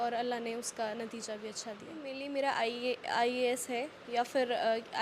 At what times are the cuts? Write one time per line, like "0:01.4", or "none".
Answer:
0:02.1